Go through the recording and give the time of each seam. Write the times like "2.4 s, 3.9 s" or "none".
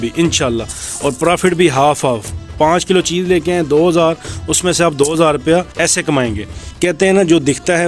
5.7 s, 6.7 s